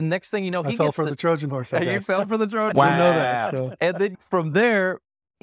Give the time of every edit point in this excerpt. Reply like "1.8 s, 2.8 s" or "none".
4.2 s